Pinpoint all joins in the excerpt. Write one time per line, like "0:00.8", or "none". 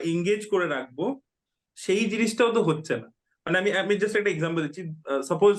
none